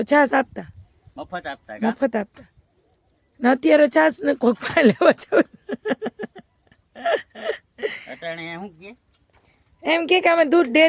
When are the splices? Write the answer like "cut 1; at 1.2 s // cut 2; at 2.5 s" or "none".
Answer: none

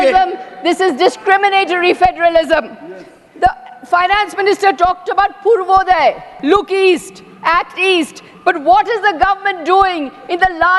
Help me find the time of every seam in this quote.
none

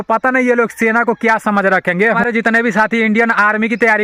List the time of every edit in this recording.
none

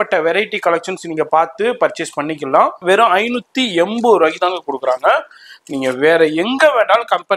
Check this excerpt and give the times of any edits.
cut 1; at 2.8 s

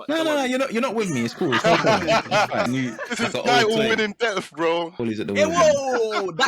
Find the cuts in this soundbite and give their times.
cut 1; at 2.7 s // cut 2; at 5.0 s

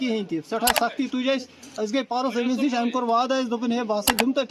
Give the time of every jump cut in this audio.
none

